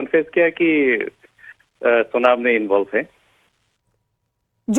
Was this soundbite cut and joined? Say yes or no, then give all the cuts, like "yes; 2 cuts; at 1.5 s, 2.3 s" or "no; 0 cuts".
yes; 1 cut; at 2.9 s